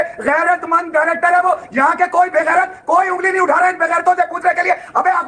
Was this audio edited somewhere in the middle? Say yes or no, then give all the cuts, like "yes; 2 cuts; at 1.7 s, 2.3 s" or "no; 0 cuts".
no; 0 cuts